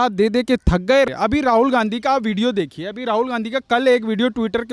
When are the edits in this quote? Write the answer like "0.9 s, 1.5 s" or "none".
1.1 s

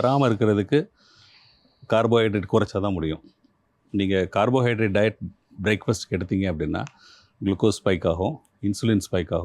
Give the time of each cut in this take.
none

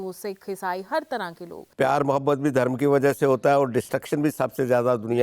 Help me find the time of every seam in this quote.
1.6 s

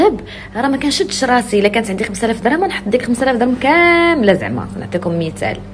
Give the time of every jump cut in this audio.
none

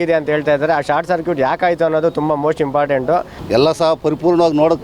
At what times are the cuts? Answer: 3.4 s

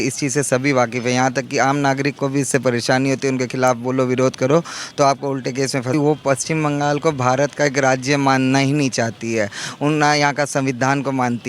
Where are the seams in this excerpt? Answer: 5.9 s

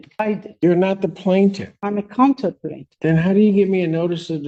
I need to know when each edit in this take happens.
none

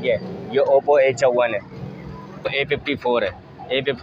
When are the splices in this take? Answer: 2.5 s

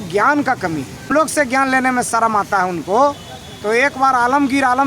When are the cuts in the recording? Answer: 1.1 s

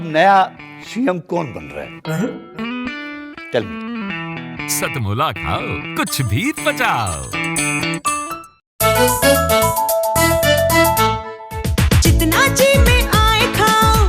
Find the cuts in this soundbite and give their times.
8.7 s

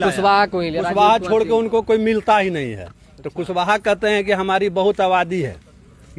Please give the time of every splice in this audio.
none

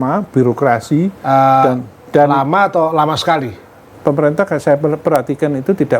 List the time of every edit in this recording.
3.9 s

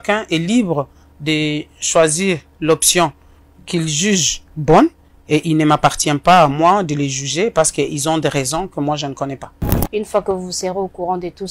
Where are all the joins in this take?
9.6 s

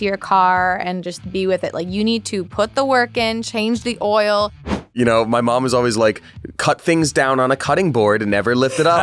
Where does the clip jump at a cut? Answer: 4.9 s

